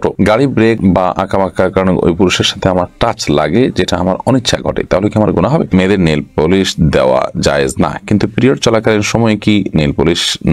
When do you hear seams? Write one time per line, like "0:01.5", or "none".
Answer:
0:05.7